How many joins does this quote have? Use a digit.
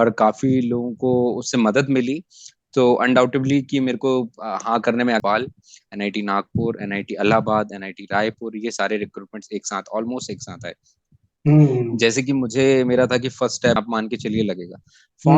2